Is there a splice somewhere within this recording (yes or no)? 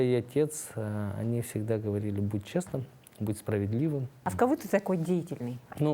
yes